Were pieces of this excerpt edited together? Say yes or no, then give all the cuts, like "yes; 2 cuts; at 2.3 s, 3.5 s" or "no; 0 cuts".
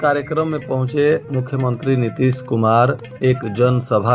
no; 0 cuts